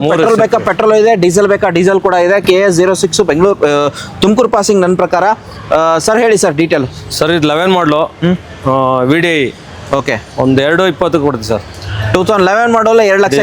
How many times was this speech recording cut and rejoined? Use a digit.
0